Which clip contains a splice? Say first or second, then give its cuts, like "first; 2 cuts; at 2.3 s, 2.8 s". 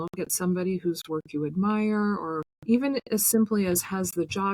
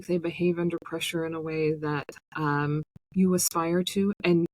first; 1 cut; at 2.5 s